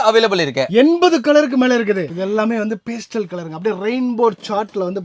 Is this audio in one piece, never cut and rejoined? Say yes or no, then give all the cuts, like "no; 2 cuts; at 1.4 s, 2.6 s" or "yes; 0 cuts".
no; 1 cut; at 2.0 s